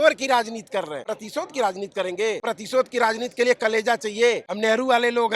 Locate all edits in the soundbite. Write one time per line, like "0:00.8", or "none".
0:01.0
0:02.4
0:04.5